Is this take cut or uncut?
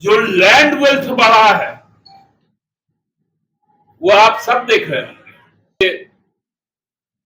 cut